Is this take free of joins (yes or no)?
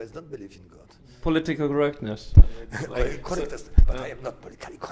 no